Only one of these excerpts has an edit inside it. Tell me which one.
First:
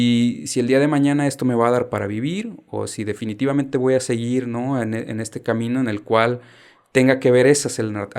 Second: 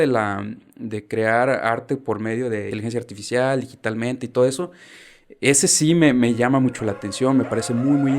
second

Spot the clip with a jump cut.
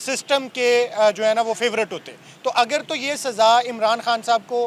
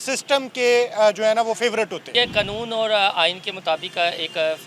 second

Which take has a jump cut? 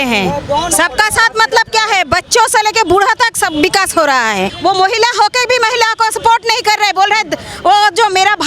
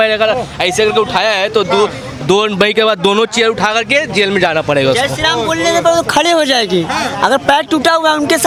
first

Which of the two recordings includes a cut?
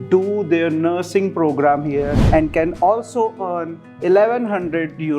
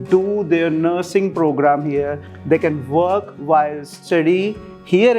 first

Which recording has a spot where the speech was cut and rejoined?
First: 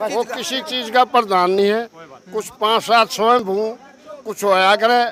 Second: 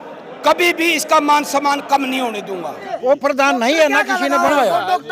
second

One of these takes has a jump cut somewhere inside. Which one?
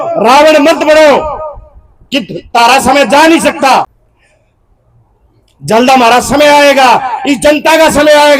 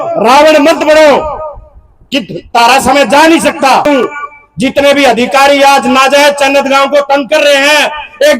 second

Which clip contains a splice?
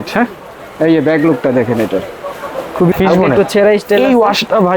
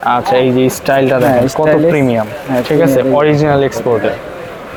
first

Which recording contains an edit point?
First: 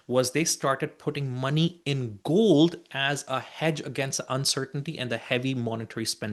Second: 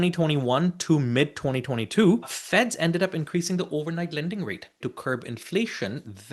second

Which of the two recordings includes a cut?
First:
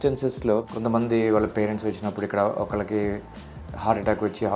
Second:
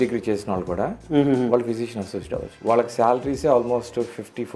second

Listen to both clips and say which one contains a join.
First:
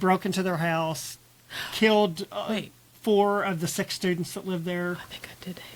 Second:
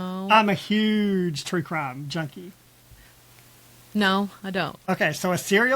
second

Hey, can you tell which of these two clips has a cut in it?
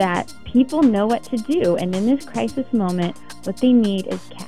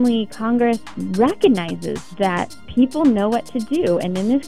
second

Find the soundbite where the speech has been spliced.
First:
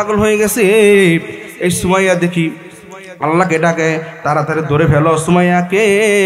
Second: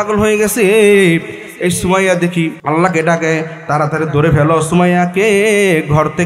second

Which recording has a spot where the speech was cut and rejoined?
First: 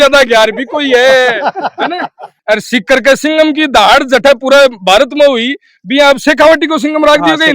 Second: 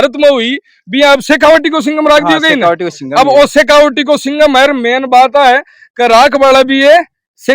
first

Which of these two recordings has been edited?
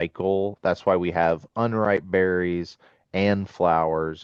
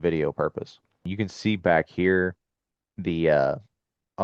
second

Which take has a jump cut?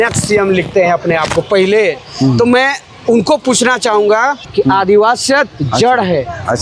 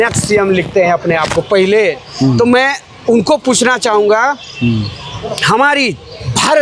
first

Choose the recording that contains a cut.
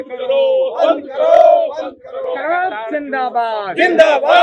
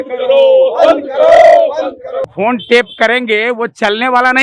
second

